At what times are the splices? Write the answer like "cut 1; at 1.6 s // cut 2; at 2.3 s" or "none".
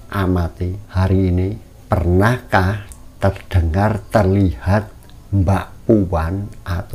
cut 1; at 0.8 s // cut 2; at 1.7 s

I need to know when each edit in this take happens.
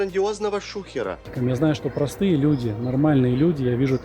cut 1; at 1.3 s

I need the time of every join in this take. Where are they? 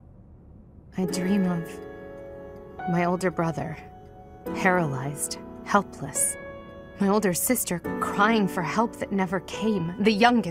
cut 1; at 0.9 s

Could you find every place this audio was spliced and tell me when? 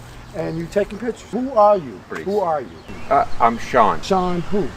cut 1; at 1.3 s // cut 2; at 2.1 s // cut 3; at 4.0 s

